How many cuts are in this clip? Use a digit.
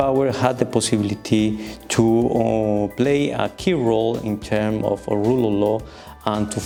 0